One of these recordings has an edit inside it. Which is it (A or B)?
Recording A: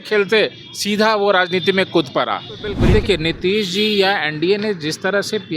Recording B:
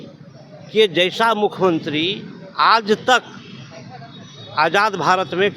A